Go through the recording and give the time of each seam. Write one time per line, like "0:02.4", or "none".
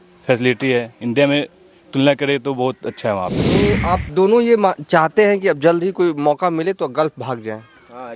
0:03.6

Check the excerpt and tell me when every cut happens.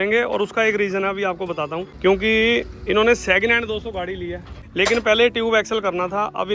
0:01.9
0:04.6

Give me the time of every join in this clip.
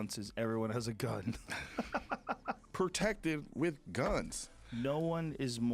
0:02.6

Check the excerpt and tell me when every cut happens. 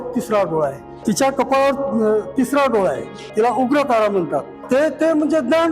0:00.9
0:03.2
0:04.6

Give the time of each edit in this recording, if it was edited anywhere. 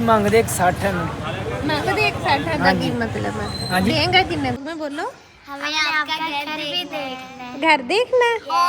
0:04.6

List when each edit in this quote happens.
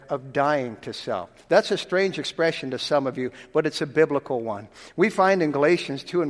none

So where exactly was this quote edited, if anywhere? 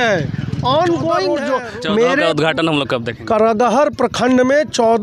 0:01.4

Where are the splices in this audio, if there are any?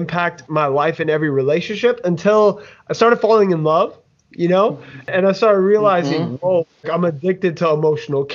0:05.1
0:06.8

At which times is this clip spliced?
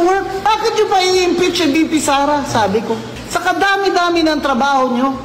none

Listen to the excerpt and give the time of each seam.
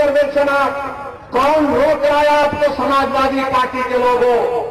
0:03.2

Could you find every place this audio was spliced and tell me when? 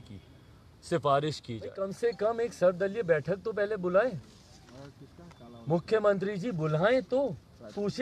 0:01.8

